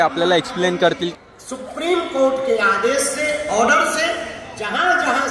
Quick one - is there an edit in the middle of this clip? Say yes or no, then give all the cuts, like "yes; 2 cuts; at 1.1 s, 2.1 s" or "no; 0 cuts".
yes; 1 cut; at 1.1 s